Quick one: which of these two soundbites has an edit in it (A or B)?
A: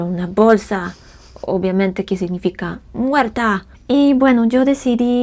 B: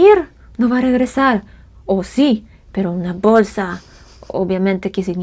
A